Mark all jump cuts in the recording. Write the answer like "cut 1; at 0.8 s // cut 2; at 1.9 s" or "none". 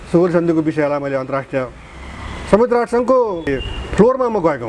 cut 1; at 3.5 s

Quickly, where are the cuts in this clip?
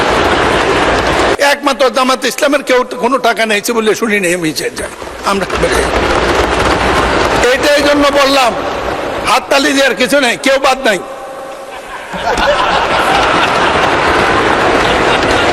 cut 1; at 1.4 s

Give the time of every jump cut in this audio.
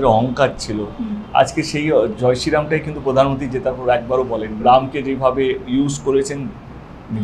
cut 1; at 4.6 s

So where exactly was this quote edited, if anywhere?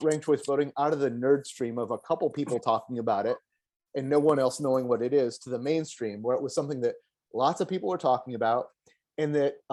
none

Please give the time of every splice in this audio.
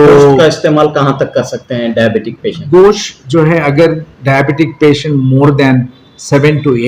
none

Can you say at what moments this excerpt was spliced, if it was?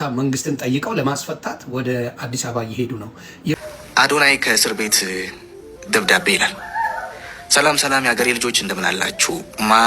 cut 1; at 3.6 s

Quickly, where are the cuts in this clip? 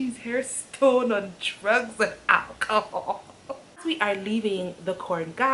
cut 1; at 3.8 s

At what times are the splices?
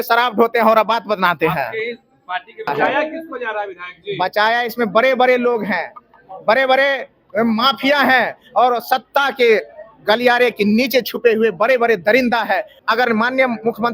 cut 1; at 2.7 s // cut 2; at 12.7 s

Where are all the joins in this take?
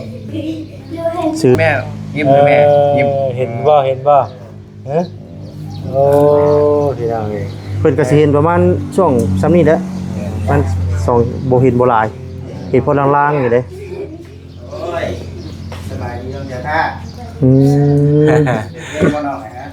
cut 1; at 1.5 s

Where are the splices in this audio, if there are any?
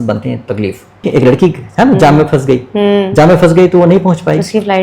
cut 1; at 1.1 s

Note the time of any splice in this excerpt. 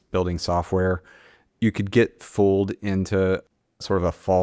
cut 1; at 1.5 s

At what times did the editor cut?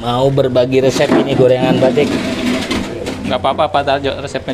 none

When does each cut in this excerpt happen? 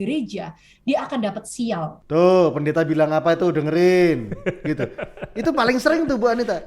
cut 1; at 1.9 s

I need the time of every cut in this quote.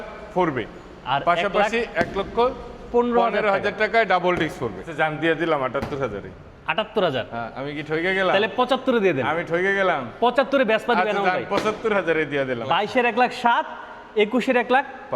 cut 1; at 4.9 s // cut 2; at 12.6 s

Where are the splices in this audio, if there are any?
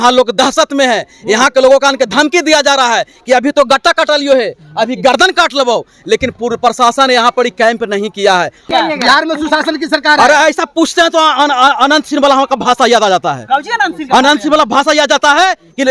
cut 1; at 8.7 s

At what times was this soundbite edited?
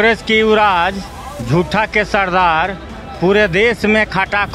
none

